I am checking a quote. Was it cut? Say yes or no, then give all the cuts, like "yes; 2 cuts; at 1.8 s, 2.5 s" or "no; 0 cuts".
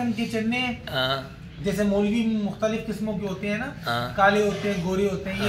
no; 0 cuts